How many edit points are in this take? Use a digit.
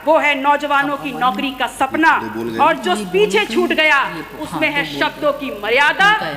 0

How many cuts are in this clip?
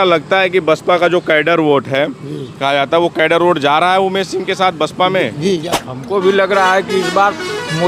1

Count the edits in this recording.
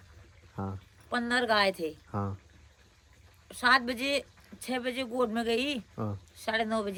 0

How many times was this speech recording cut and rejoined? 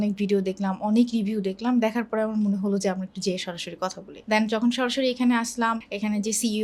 0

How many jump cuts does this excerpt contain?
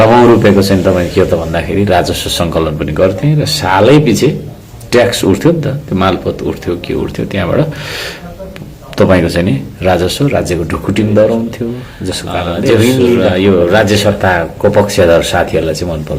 1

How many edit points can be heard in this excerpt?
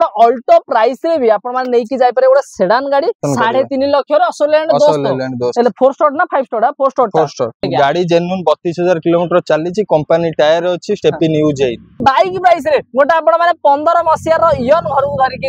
3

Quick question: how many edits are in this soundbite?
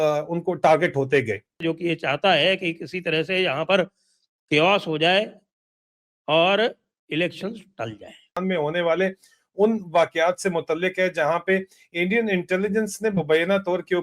2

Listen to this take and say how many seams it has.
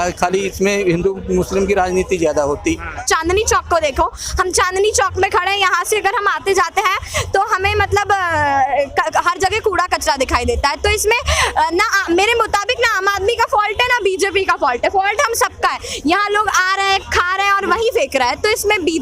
1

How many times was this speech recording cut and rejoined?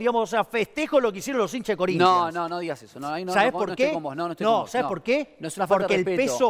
0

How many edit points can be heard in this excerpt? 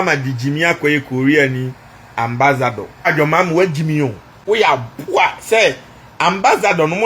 2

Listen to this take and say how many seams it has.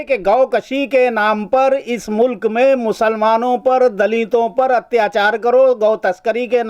0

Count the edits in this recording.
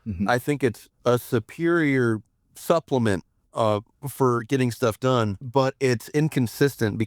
1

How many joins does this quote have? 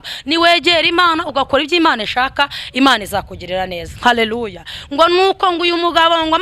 0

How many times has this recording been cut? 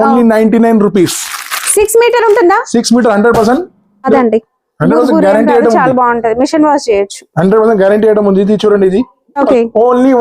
2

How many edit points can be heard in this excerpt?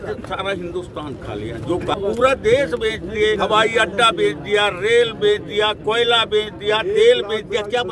2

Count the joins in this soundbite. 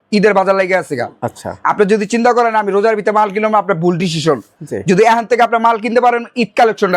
0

